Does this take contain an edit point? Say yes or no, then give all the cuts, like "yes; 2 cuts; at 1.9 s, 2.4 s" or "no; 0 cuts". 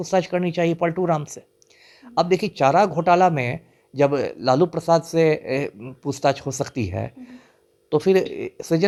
no; 0 cuts